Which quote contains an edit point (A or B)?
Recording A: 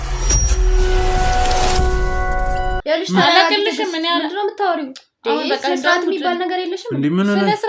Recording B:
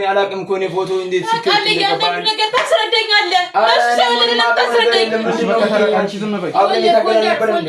A